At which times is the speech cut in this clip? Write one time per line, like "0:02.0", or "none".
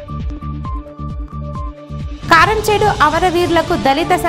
0:01.4

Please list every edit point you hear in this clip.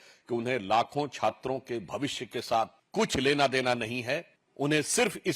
0:02.8
0:04.4

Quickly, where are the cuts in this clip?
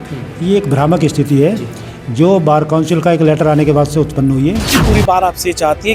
0:04.7

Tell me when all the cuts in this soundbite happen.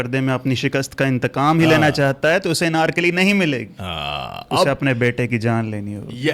none

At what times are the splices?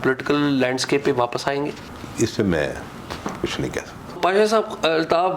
0:04.2

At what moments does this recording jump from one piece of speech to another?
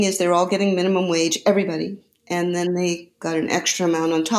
none

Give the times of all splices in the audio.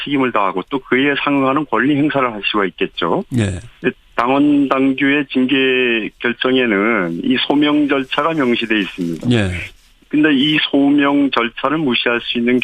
0:06.7

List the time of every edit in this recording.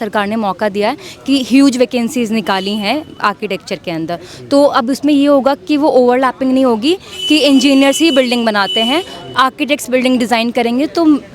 none

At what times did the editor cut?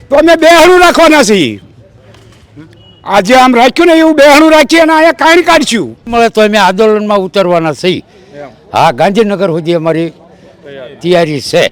0:06.1

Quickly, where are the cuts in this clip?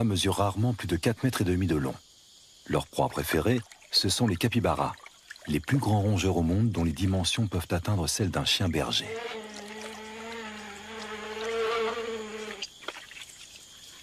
0:01.0

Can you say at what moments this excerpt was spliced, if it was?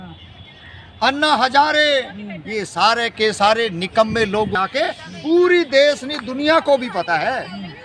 0:04.5

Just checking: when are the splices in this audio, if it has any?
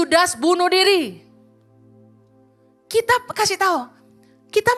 none

